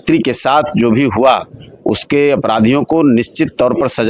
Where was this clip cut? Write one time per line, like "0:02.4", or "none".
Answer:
none

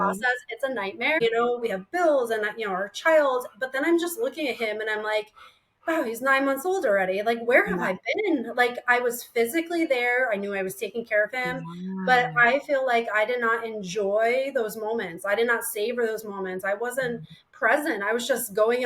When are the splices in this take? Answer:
0:01.2

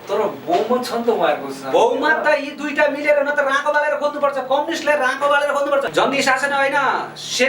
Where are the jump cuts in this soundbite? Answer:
0:05.9

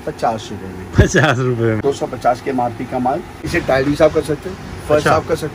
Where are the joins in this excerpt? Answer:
0:01.8
0:03.4

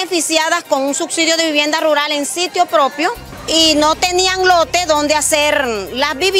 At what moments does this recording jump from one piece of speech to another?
0:03.3

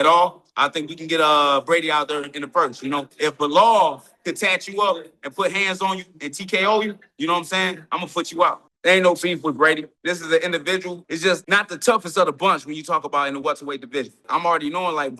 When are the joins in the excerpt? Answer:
0:03.1
0:08.7
0:09.9
0:11.0
0:14.2

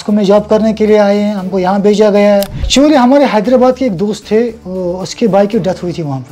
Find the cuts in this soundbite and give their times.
0:02.7

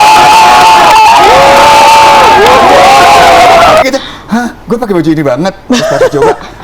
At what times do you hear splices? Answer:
0:03.8

